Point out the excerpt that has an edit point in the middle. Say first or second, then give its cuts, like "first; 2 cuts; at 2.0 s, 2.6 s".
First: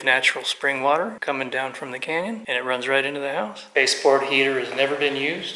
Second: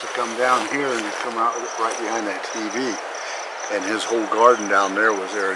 first; 3 cuts; at 1.2 s, 2.4 s, 3.6 s